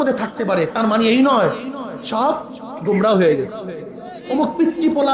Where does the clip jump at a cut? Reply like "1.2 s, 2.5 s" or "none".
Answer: 4.2 s